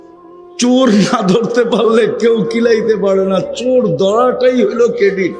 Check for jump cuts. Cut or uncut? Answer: uncut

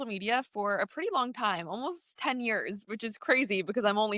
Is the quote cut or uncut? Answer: uncut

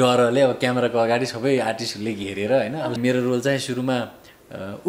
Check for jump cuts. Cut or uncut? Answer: cut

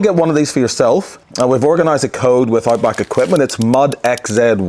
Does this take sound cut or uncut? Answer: cut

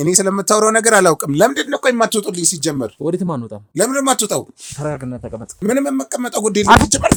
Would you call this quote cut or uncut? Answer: uncut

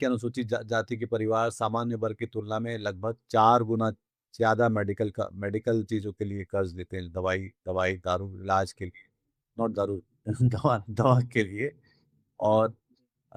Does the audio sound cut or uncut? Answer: uncut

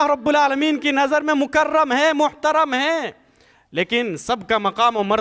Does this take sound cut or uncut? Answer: uncut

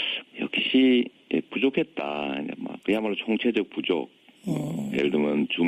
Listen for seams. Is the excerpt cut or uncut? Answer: cut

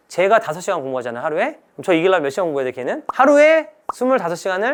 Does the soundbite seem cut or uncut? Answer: uncut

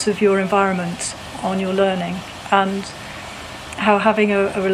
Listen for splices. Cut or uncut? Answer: uncut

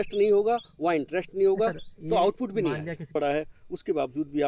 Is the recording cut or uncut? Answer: cut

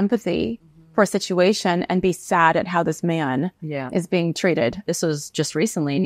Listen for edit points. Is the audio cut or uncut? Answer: cut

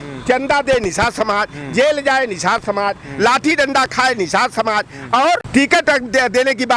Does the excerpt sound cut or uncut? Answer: cut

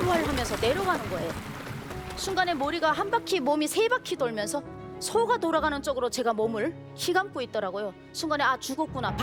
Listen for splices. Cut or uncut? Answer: uncut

